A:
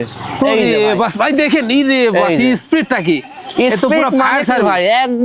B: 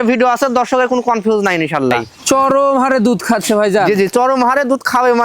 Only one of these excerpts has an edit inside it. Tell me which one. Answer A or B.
B